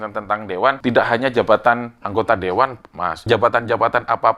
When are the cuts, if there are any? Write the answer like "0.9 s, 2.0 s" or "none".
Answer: 0.8 s, 3.2 s